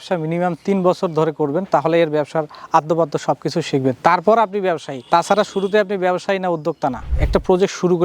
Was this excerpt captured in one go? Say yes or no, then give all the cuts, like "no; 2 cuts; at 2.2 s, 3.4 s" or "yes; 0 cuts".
no; 1 cut; at 7.0 s